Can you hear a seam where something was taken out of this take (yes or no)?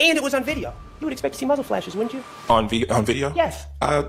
no